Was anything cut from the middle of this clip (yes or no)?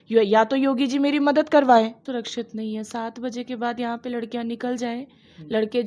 yes